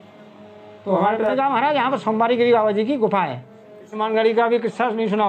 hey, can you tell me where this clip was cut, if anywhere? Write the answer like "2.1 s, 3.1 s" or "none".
1.3 s, 4.0 s

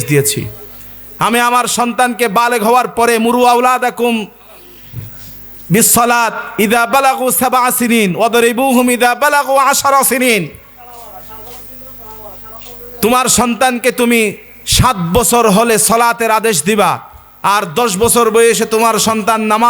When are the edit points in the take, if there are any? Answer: none

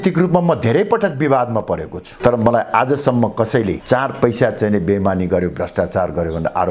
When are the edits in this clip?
none

